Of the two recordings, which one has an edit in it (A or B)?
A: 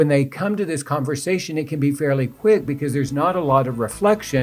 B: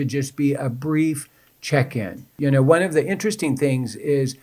B